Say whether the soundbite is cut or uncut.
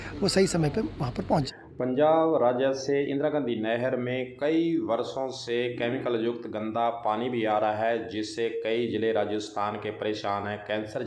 uncut